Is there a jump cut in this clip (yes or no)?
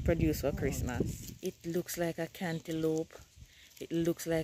yes